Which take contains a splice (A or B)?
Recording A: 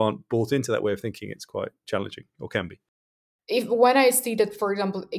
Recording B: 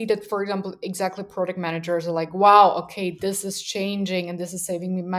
A